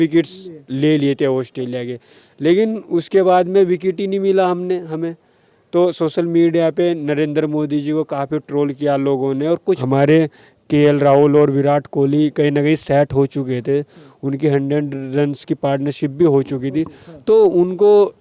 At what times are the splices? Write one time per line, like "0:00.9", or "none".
0:09.8